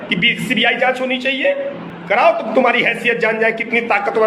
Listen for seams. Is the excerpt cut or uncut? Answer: cut